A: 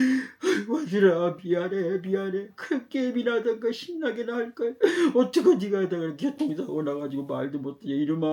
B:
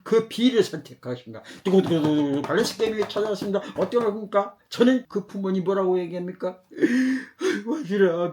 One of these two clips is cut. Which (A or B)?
B